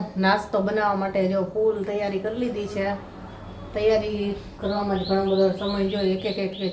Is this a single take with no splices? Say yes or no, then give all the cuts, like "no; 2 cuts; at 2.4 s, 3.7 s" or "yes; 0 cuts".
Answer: yes; 0 cuts